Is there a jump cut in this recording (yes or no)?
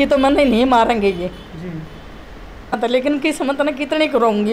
yes